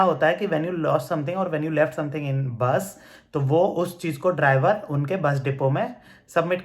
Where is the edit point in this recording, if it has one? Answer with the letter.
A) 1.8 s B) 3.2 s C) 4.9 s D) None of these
D